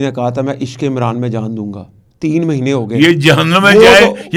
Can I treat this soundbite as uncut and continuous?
yes; 0 cuts

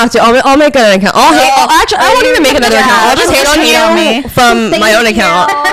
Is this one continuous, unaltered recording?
yes; 0 cuts

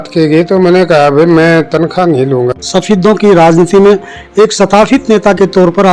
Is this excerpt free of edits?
no; 1 cut; at 2.6 s

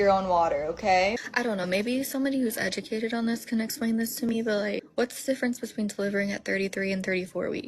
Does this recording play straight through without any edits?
no; 2 cuts; at 1.1 s, 4.9 s

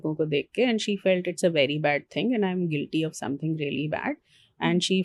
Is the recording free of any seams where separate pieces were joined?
yes; 0 cuts

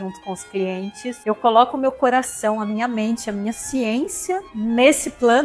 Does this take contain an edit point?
yes; 2 cuts; at 1.2 s, 4.5 s

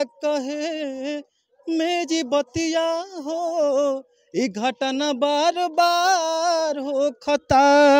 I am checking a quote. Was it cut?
no; 0 cuts

